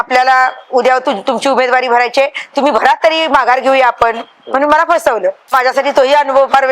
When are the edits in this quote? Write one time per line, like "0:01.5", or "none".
0:05.5